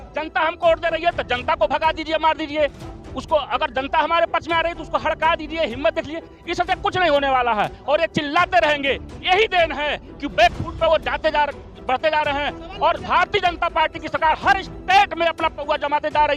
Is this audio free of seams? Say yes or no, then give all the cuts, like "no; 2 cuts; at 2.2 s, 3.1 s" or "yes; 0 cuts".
yes; 0 cuts